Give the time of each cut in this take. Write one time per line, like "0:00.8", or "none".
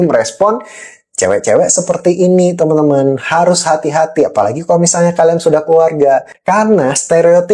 0:06.3